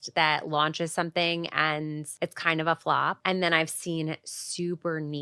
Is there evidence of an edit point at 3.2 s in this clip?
yes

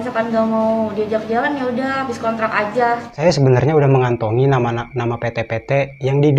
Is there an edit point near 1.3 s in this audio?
no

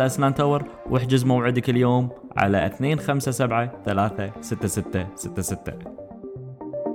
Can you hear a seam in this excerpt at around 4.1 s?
no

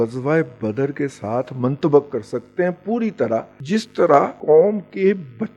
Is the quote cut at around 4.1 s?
yes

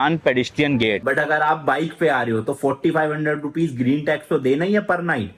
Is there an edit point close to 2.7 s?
no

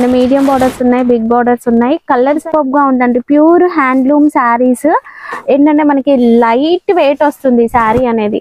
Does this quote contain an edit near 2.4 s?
yes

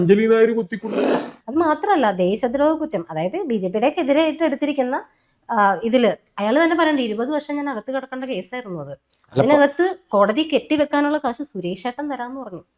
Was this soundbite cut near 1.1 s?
yes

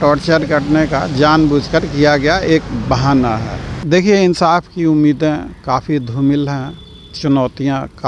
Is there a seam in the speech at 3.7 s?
yes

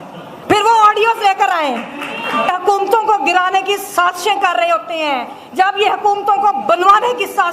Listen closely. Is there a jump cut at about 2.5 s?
yes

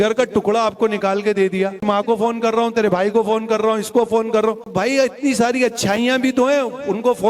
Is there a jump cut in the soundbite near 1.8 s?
yes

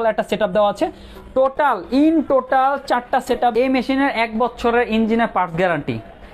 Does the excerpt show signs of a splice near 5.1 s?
no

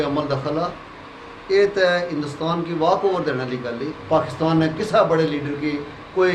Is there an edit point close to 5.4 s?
no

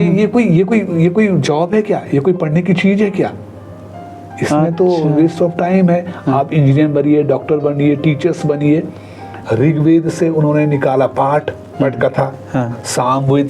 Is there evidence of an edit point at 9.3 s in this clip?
yes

